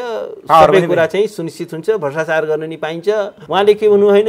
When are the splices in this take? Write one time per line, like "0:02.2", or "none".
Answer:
0:03.4